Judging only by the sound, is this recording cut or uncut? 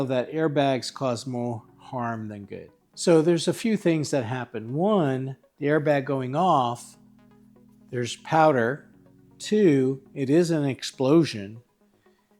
cut